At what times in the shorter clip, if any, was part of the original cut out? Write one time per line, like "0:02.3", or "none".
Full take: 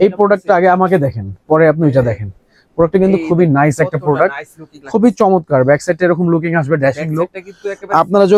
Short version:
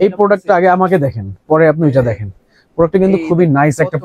none